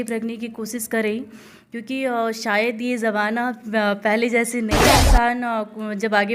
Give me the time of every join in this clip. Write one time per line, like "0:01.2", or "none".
0:04.9

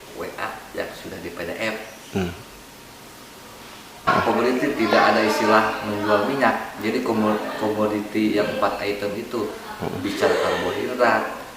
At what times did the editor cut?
0:04.1

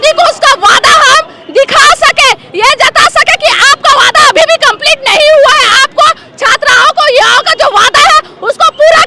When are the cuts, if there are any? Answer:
none

